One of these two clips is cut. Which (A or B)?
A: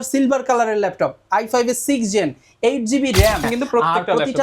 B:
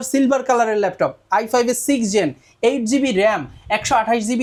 A